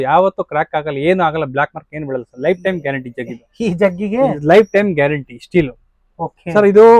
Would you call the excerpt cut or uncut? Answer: uncut